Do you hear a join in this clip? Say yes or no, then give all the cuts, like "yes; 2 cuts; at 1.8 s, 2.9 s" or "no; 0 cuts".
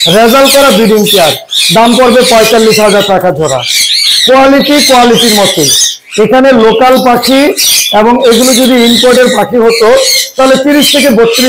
no; 0 cuts